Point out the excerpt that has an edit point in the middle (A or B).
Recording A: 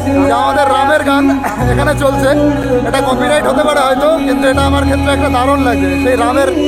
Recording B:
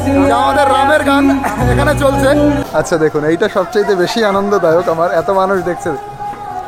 B